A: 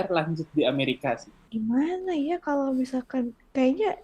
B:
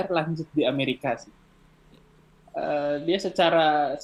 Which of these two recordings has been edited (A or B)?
A